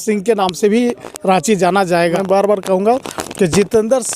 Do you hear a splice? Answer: yes; 1 cut; at 2.2 s

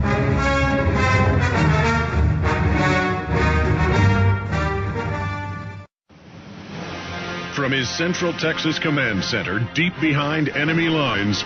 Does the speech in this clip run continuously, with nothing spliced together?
no; 1 cut; at 1.6 s

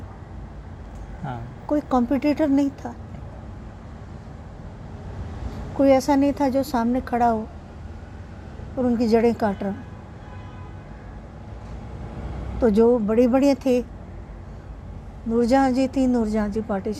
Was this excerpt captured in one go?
yes; 0 cuts

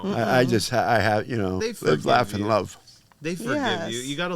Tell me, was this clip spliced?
yes; 1 cut; at 1.6 s

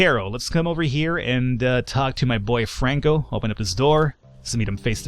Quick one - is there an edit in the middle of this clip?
no; 0 cuts

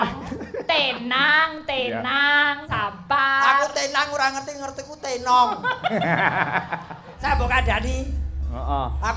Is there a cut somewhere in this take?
yes; 1 cut; at 7.3 s

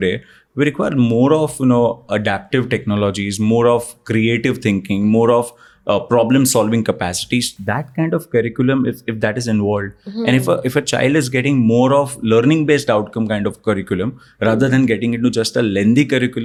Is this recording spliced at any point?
no; 0 cuts

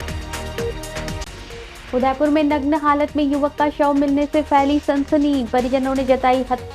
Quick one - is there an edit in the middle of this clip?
yes; 1 cut; at 1.1 s

